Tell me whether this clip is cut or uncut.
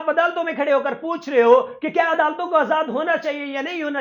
uncut